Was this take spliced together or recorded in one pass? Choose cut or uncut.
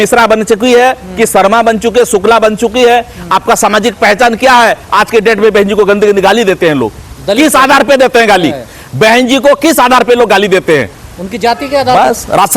uncut